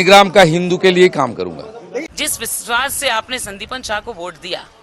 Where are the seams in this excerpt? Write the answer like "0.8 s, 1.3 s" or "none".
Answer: 2.1 s